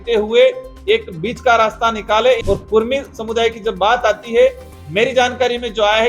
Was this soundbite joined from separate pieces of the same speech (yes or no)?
yes